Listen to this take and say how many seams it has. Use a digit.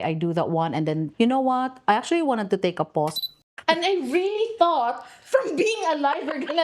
2